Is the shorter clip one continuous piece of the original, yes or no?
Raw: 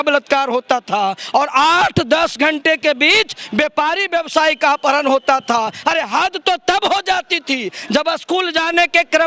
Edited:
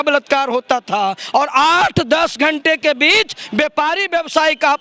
yes